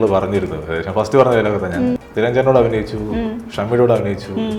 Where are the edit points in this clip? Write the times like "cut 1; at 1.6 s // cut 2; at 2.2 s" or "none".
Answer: cut 1; at 2.0 s